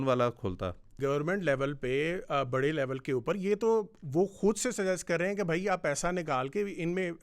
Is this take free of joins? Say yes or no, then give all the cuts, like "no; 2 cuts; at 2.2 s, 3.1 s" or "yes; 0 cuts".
no; 1 cut; at 1.0 s